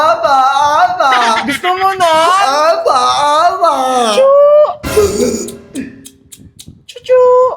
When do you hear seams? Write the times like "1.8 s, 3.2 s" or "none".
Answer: none